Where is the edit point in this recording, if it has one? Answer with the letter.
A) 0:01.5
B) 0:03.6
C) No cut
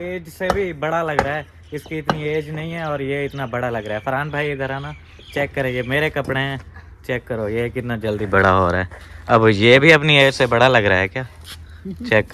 C